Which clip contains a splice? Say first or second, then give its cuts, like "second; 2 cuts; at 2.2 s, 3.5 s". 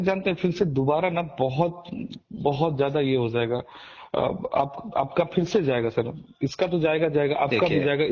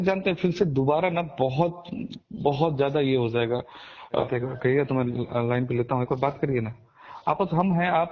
second; 1 cut; at 4.2 s